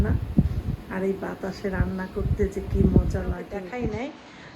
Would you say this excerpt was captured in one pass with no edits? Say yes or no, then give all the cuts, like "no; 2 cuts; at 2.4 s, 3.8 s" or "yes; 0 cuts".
no; 1 cut; at 3.6 s